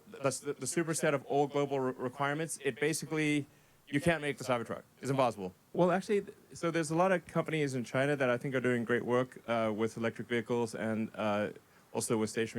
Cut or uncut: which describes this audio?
cut